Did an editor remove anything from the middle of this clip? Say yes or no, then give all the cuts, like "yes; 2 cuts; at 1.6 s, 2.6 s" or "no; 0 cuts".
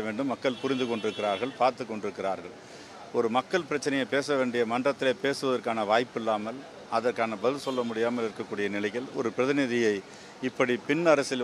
no; 0 cuts